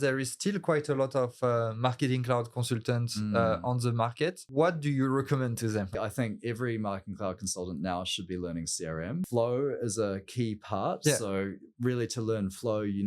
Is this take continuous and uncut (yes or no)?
no